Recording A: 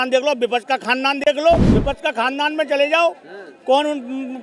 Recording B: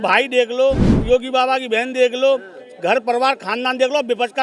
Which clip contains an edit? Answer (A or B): A